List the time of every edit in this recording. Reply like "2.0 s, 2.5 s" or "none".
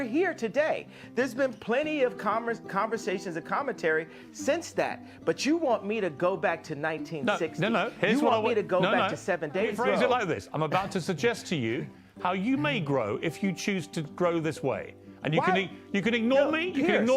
9.7 s